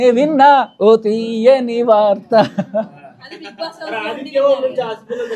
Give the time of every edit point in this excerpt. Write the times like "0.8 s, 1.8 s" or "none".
none